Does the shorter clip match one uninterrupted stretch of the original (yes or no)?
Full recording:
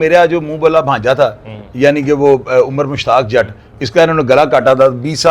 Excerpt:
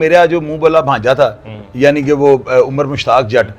yes